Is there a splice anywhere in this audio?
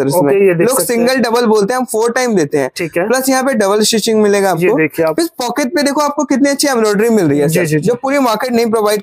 no; 0 cuts

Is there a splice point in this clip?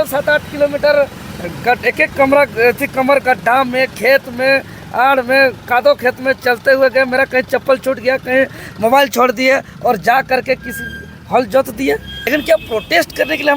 yes; 1 cut; at 12.1 s

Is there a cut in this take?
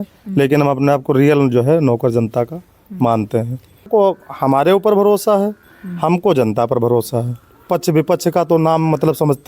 yes; 2 cuts; at 3.9 s, 7.7 s

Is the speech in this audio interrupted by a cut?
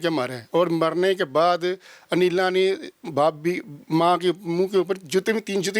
no; 0 cuts

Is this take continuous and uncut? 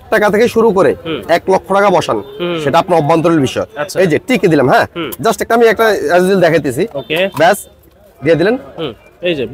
yes; 0 cuts

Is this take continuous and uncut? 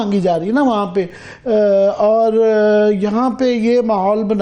yes; 0 cuts

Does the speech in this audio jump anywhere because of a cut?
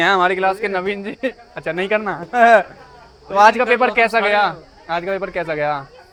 no; 0 cuts

